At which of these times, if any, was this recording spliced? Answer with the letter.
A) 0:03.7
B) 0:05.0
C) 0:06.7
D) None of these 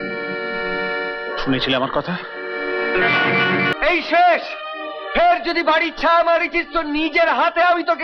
A